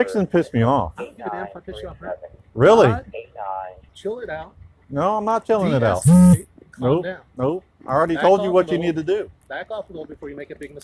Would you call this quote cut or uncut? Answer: cut